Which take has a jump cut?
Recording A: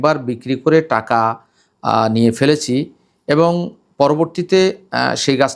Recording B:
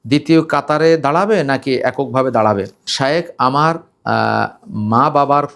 B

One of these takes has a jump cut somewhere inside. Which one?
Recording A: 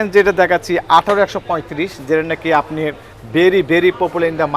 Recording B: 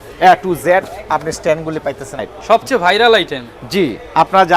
B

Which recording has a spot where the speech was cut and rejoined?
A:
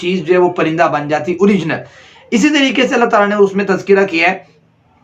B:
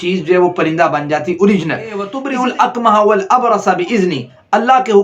B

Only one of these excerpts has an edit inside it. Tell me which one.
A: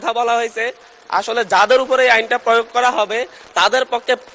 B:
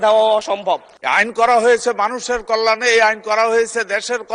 B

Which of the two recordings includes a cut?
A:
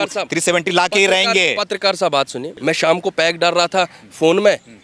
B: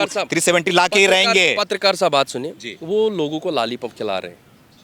A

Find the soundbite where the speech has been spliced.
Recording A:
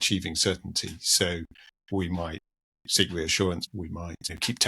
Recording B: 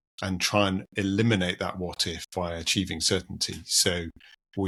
A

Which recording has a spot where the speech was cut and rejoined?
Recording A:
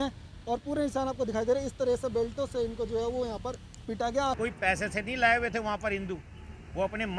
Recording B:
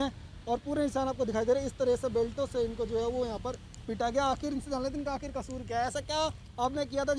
A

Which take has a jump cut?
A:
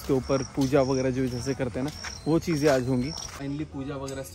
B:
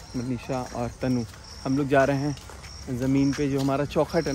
A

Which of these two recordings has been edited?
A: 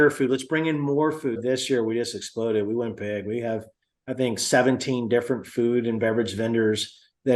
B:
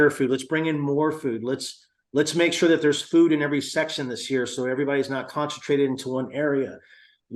A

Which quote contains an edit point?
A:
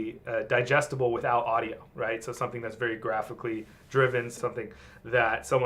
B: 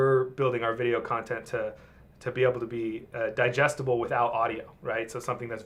A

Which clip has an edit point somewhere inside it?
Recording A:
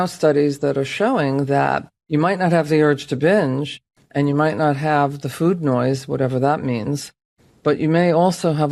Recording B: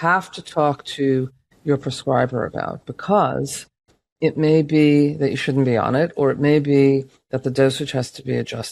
A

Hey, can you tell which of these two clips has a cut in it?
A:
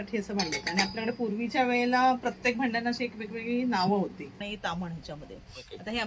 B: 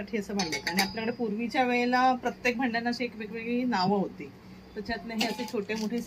A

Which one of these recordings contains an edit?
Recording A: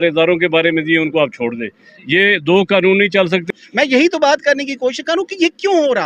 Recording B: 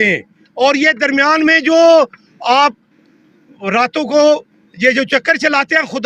A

